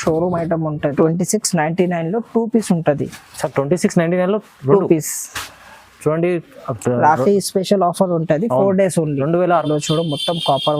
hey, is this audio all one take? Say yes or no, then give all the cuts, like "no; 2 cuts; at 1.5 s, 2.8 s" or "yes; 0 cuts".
no; 2 cuts; at 0.9 s, 9.5 s